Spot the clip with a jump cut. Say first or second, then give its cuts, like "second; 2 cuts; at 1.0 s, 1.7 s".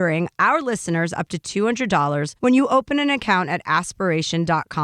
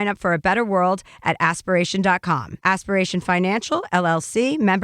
second; 1 cut; at 2.5 s